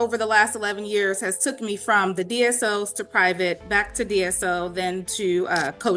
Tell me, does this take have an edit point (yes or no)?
no